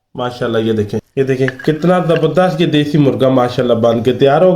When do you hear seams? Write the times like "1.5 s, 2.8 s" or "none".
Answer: 1.1 s